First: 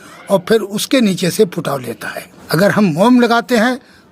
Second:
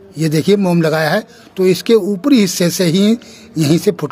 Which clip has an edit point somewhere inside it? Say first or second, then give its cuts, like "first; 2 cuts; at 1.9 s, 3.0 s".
first; 1 cut; at 2.3 s